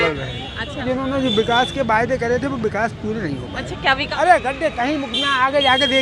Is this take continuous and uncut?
no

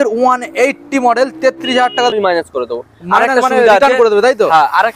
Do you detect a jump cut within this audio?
yes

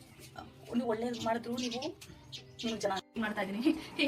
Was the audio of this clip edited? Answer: yes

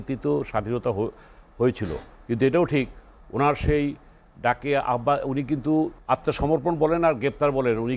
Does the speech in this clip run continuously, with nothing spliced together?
no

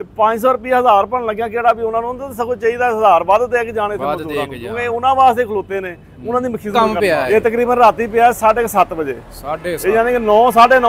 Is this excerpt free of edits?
yes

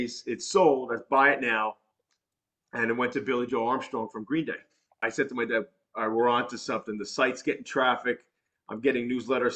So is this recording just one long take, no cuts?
no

